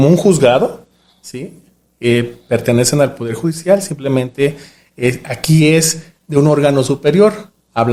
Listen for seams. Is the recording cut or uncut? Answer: uncut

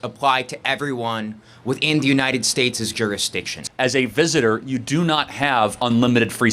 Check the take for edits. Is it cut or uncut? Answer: cut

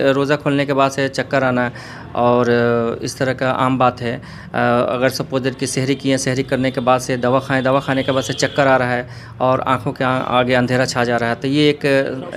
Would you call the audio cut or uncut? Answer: uncut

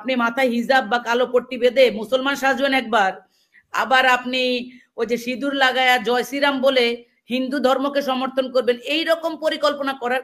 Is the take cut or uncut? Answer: uncut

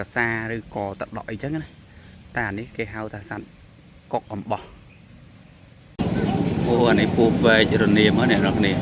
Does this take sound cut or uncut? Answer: cut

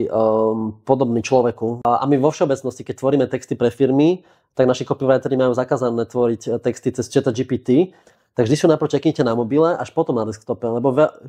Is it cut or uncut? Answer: cut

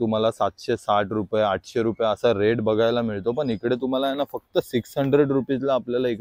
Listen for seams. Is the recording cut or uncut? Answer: uncut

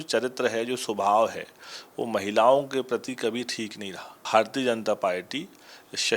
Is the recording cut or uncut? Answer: cut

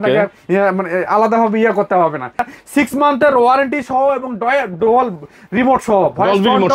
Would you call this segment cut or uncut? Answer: cut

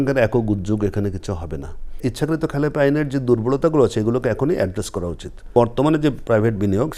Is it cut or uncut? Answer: cut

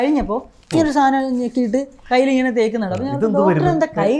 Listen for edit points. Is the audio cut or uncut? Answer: uncut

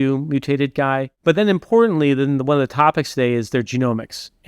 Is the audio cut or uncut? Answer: cut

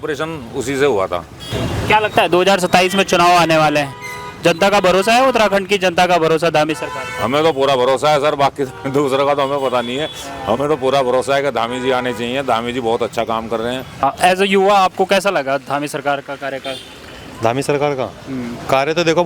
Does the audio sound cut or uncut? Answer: cut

